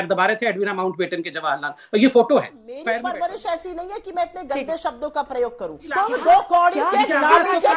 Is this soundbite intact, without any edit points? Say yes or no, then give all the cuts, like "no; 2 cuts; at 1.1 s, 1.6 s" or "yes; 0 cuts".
no; 2 cuts; at 2.7 s, 5.8 s